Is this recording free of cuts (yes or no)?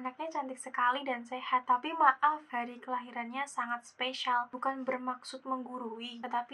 yes